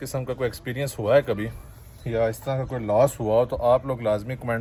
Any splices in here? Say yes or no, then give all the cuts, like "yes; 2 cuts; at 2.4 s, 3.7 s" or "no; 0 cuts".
no; 0 cuts